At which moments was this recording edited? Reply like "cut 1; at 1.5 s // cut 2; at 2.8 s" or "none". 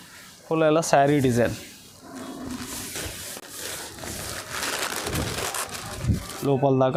none